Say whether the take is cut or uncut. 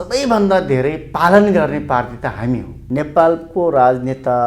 cut